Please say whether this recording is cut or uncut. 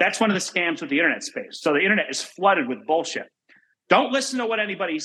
uncut